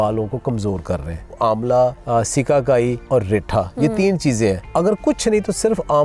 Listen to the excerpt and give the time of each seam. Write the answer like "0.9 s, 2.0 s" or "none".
1.4 s, 2.0 s, 3.0 s, 4.6 s